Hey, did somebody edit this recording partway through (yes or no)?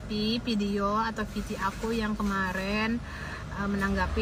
no